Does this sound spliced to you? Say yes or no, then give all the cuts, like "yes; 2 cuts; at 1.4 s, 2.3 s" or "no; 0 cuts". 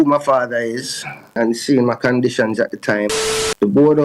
yes; 2 cuts; at 1.4 s, 3.1 s